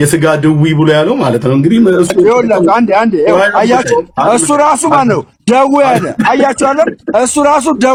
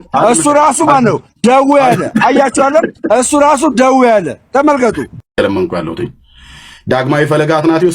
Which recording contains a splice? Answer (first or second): second